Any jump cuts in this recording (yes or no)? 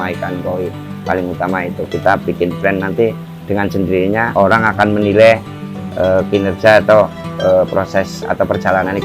yes